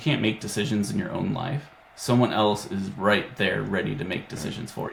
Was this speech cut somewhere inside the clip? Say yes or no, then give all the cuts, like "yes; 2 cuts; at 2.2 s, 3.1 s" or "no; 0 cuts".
no; 0 cuts